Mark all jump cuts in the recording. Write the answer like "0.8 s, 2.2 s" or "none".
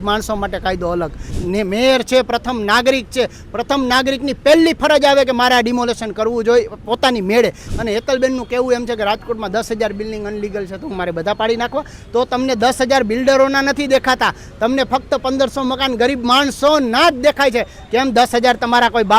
1.3 s, 7.7 s